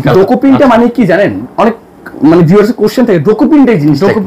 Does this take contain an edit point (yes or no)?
no